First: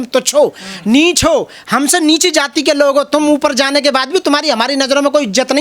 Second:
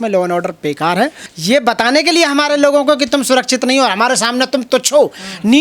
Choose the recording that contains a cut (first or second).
second